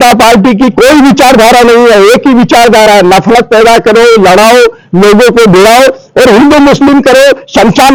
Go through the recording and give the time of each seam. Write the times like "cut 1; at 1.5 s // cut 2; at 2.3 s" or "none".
none

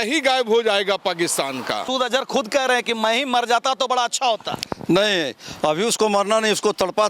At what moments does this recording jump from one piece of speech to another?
cut 1; at 1.9 s

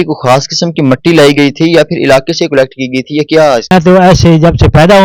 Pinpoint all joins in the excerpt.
cut 1; at 3.7 s

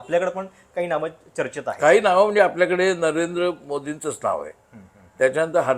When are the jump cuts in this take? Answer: none

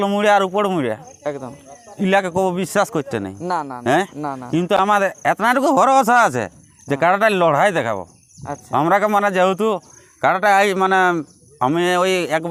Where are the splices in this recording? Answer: none

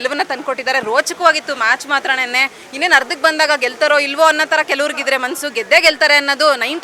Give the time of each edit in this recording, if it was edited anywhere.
none

